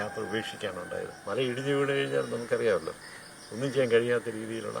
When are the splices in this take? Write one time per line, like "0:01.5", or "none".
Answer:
0:01.2